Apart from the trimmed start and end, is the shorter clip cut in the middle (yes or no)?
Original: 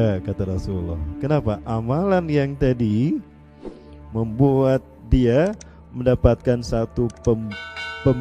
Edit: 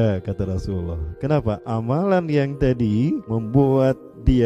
yes